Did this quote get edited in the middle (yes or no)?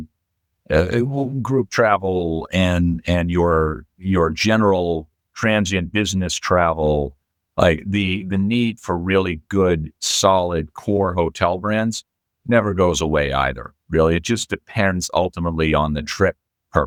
no